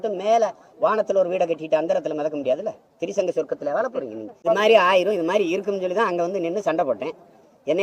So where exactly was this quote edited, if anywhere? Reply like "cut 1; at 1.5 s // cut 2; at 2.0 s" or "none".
cut 1; at 4.4 s